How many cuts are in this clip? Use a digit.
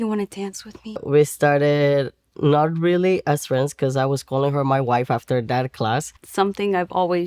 2